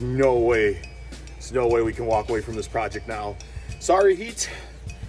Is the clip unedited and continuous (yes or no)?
no